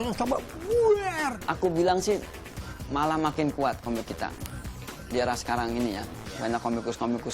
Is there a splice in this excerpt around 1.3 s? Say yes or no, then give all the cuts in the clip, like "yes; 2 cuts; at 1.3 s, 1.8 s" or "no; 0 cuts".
yes; 1 cut; at 1.3 s